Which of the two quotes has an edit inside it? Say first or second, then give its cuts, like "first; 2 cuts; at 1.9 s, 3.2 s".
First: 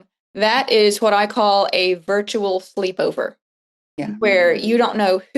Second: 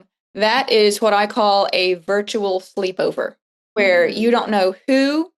second; 1 cut; at 3.7 s